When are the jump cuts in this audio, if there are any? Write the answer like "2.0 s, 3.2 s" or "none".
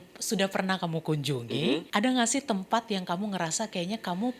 1.9 s